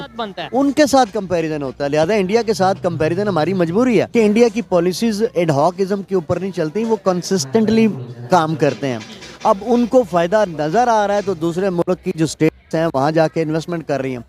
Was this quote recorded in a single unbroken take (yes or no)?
no